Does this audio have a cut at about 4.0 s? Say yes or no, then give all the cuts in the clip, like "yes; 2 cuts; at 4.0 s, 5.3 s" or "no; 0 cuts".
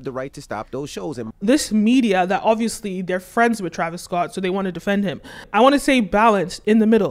no; 2 cuts; at 1.3 s, 5.4 s